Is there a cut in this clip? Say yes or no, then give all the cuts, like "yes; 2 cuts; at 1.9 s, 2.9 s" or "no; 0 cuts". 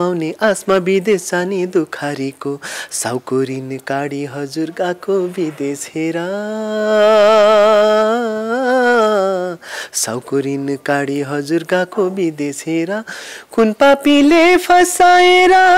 no; 0 cuts